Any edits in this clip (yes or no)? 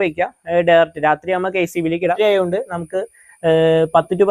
yes